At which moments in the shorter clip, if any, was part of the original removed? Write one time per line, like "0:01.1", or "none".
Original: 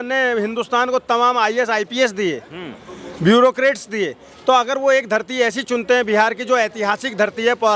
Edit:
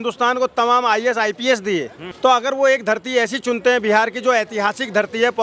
0:02.0